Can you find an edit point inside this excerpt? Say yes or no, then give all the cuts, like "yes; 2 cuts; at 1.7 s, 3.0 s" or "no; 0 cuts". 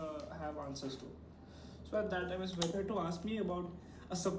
yes; 1 cut; at 2.7 s